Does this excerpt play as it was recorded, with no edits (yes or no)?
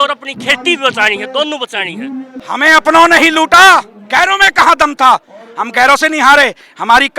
no